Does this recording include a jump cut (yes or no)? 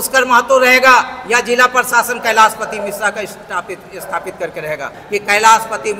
yes